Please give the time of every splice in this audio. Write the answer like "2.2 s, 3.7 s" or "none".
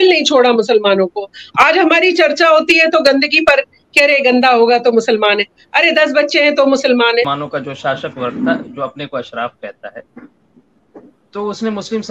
7.4 s